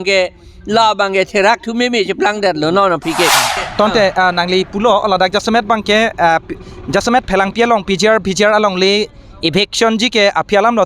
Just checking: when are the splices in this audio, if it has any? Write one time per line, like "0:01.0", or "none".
0:03.5